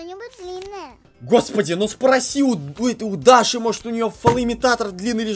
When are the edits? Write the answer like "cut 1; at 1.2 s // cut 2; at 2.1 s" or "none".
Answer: cut 1; at 1.1 s